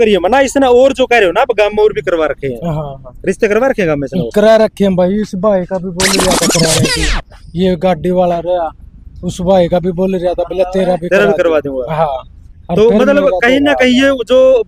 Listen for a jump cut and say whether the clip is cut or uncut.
uncut